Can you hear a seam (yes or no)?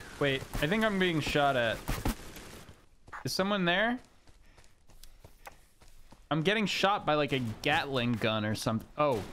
yes